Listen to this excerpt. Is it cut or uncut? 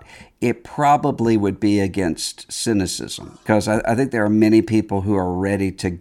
cut